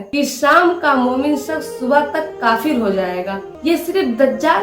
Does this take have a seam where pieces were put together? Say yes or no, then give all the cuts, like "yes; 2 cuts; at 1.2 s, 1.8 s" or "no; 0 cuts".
yes; 1 cut; at 3.5 s